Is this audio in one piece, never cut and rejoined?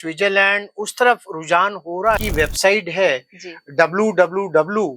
no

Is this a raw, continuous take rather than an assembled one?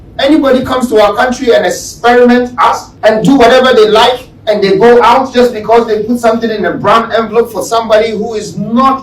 no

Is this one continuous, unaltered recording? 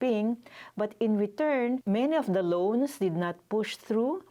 yes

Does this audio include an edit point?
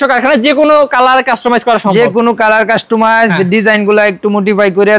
no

